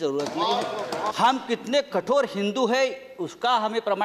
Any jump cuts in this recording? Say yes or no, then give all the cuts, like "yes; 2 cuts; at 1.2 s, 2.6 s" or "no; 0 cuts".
yes; 1 cut; at 1.1 s